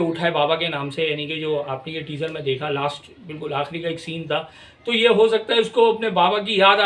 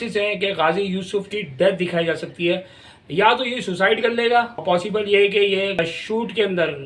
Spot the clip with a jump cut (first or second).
second